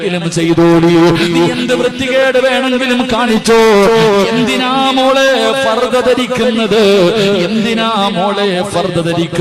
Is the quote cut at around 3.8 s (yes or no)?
no